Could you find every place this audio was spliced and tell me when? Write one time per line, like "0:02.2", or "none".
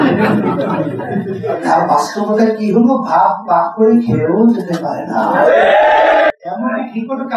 none